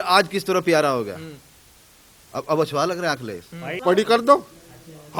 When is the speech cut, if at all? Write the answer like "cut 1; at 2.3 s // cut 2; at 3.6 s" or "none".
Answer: cut 1; at 3.7 s